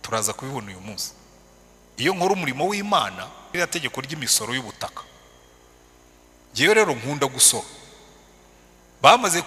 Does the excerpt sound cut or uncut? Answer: cut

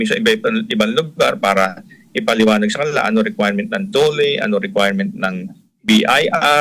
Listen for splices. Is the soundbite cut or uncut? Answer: uncut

